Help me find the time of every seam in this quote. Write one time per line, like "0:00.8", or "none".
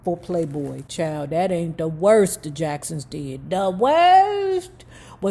none